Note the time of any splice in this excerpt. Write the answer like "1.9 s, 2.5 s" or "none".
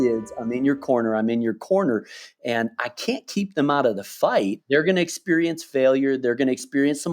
4.6 s